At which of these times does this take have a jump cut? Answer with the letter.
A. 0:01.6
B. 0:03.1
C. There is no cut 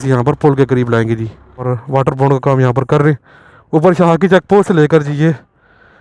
A